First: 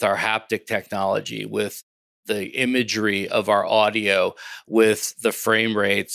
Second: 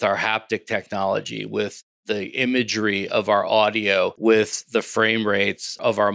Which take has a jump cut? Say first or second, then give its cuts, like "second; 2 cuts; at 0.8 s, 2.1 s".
second; 2 cuts; at 1.9 s, 4.1 s